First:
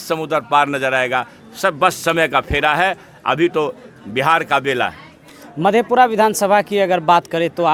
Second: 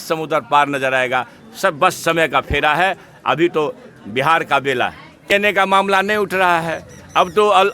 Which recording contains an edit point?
second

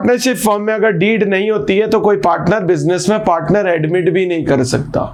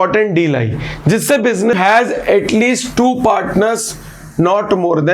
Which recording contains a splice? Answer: second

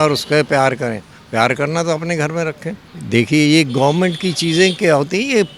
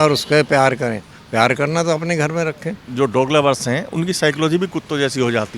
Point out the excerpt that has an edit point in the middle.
second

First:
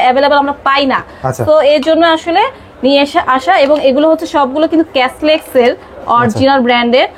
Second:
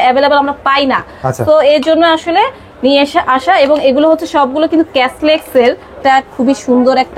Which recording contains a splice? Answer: second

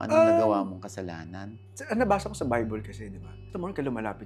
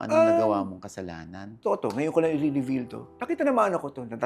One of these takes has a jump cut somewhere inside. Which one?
second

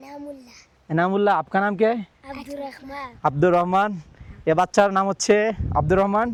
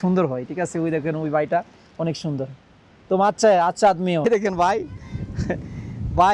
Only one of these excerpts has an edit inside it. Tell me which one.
second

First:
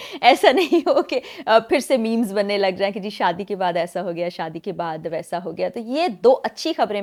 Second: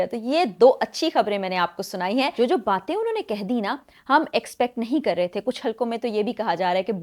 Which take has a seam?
second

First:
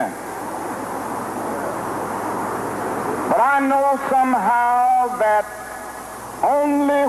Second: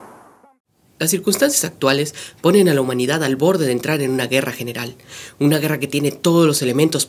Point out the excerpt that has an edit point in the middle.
first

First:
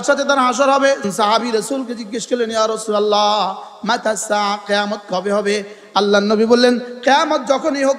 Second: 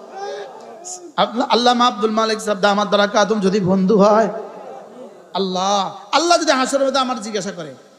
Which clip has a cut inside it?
first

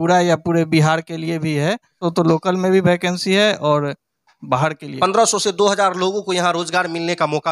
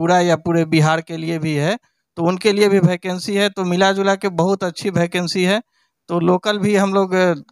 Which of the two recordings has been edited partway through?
first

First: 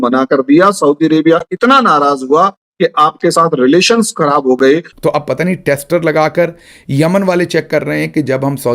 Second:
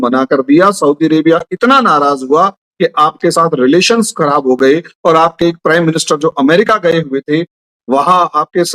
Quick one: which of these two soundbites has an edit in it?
first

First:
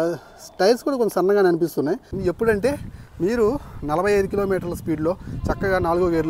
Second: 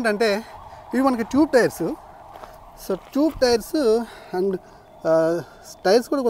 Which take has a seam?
first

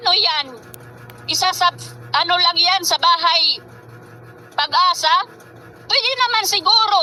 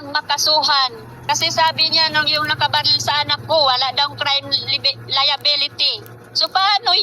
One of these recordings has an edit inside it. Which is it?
second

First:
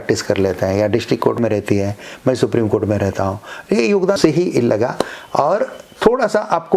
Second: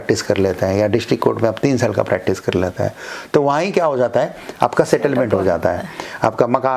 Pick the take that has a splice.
first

